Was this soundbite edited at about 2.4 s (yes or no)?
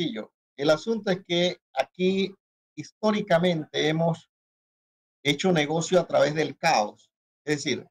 no